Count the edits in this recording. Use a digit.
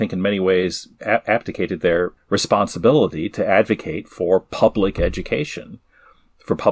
2